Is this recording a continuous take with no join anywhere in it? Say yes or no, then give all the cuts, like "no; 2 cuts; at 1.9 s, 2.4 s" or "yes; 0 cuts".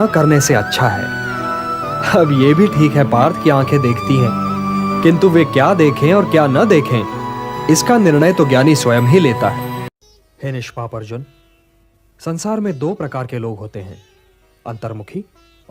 yes; 0 cuts